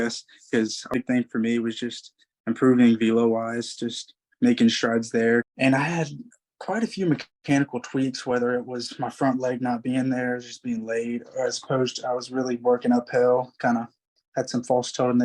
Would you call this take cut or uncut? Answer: cut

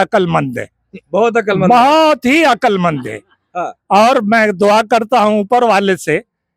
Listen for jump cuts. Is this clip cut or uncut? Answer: uncut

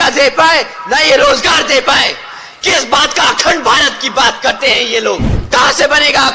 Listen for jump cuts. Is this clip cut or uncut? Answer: cut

